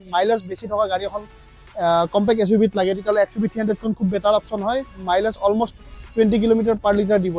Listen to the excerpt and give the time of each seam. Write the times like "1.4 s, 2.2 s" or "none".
4.9 s